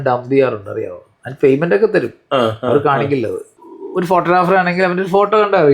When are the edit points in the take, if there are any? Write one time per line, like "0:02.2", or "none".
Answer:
0:03.5